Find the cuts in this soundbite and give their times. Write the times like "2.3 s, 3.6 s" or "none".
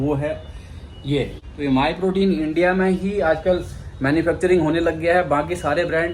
1.4 s